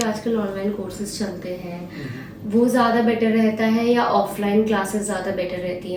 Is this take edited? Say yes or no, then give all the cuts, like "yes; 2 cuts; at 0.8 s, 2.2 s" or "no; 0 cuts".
no; 0 cuts